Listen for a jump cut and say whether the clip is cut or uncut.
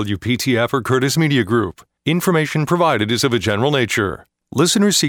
uncut